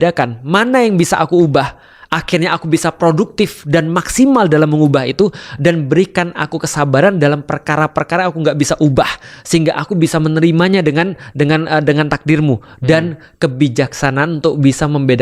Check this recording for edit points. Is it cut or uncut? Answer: uncut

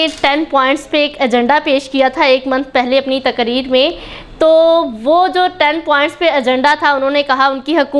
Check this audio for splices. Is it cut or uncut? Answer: uncut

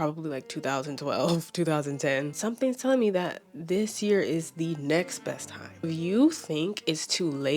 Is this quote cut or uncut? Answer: cut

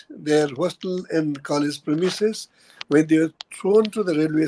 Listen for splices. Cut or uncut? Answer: uncut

